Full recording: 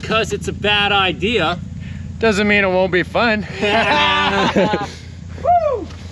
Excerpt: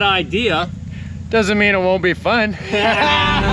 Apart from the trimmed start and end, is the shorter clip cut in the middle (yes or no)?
no